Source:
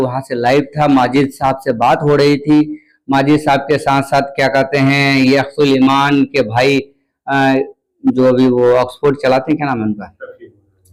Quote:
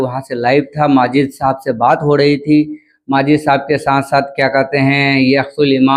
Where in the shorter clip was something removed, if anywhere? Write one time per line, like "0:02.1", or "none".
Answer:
none